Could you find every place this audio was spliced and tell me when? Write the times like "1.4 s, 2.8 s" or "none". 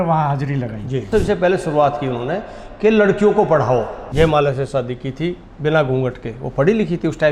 1.1 s, 4.0 s